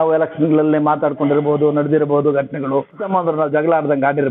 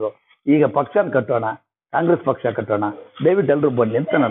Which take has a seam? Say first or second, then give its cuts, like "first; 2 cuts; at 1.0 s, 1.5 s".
first; 1 cut; at 3.0 s